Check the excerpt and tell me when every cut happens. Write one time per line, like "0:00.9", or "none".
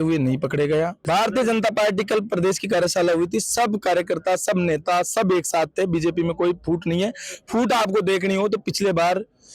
0:01.0